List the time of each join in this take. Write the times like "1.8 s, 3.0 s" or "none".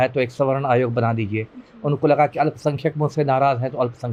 none

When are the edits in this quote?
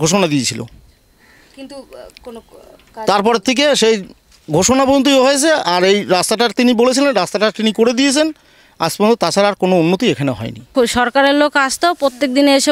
10.7 s

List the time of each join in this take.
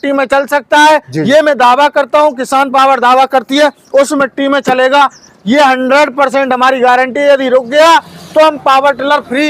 none

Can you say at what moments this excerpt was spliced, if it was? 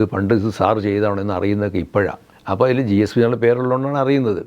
2.3 s

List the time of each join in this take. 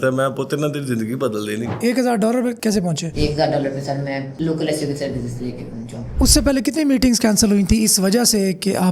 1.7 s, 6.1 s

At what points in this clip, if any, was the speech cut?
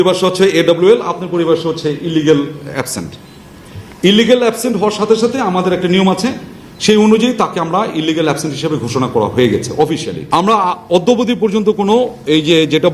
10.1 s

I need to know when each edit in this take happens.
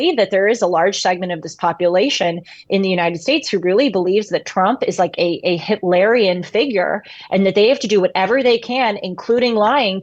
none

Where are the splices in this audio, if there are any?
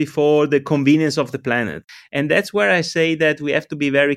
2.0 s

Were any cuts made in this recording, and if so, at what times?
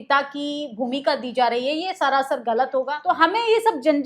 2.9 s

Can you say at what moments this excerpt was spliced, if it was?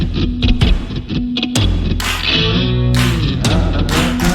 none

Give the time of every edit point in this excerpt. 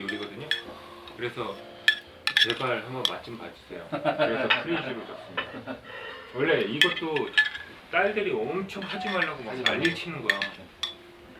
1.1 s

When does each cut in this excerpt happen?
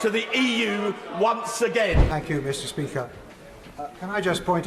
2.0 s

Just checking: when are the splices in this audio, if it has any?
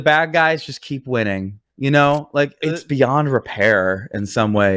2.5 s

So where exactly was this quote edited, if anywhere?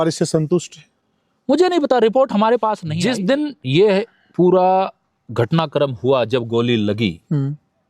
2.9 s

